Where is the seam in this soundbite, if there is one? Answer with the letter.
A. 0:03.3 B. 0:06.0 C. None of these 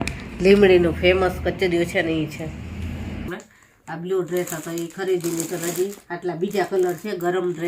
A